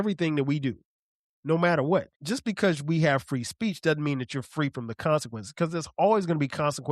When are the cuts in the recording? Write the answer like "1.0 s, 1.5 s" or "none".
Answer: 2.2 s